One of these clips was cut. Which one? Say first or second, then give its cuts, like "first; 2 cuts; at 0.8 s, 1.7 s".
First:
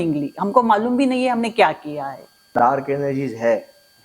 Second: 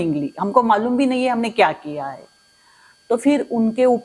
first; 1 cut; at 2.5 s